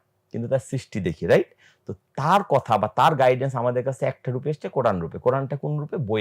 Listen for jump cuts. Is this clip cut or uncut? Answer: uncut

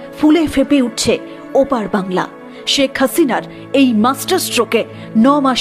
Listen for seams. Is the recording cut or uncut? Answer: uncut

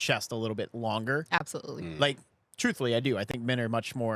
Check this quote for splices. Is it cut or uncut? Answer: uncut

